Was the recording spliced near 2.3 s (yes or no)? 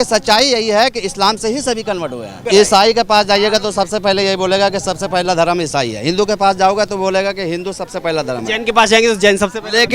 yes